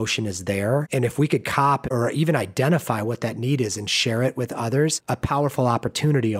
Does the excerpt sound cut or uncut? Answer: cut